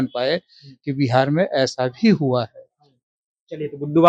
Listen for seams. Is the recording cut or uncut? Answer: uncut